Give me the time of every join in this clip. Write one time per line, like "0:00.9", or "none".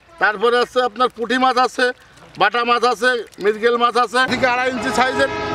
0:04.3